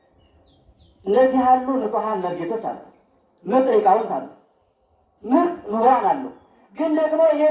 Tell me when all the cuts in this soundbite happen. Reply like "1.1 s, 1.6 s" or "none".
none